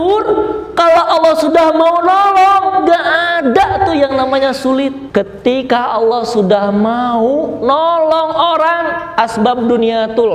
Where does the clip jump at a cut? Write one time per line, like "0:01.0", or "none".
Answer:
0:05.0